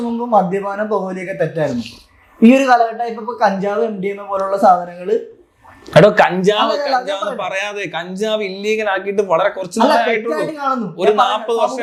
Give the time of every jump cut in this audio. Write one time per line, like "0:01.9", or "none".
none